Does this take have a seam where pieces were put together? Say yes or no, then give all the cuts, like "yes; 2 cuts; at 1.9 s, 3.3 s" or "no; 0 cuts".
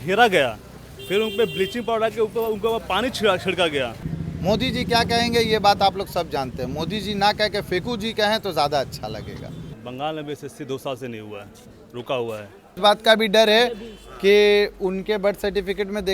yes; 3 cuts; at 4.1 s, 9.7 s, 12.7 s